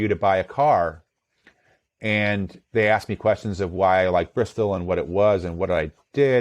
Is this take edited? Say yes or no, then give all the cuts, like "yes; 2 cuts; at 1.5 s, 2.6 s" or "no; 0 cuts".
no; 0 cuts